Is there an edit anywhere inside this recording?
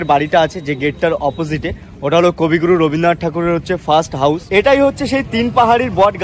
yes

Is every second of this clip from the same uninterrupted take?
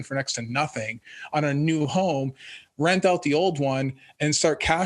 yes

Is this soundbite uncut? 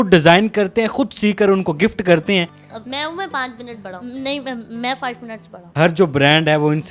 no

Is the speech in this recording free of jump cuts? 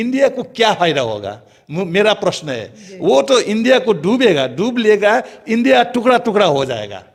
yes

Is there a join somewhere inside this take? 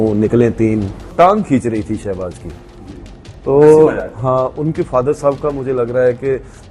yes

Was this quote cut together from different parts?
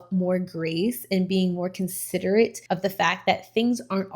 yes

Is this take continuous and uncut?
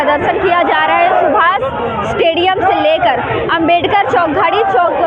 yes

